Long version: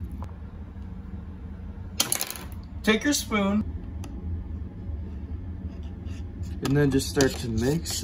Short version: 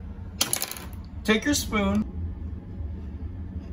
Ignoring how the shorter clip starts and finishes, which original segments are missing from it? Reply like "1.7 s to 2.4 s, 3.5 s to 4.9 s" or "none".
3.6 s to 4.1 s